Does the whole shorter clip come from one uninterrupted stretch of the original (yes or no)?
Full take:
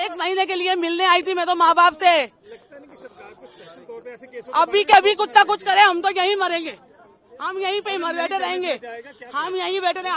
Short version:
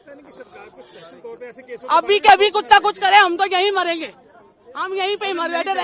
yes